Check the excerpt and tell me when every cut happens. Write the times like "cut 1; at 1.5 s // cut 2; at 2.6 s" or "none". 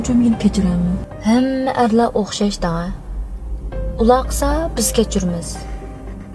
cut 1; at 1.1 s